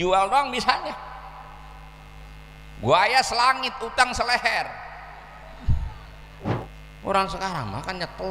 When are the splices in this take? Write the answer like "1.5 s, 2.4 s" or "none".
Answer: 6.7 s